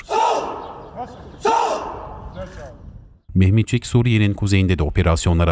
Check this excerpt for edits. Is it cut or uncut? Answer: cut